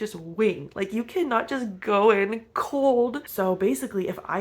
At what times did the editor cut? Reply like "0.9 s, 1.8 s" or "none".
3.2 s